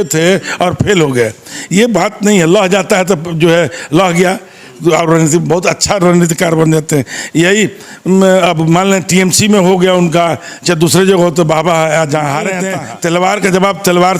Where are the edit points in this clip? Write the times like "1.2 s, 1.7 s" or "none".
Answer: 12.7 s